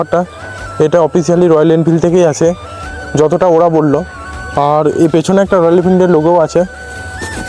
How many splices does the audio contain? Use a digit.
0